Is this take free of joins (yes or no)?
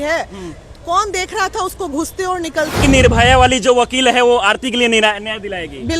no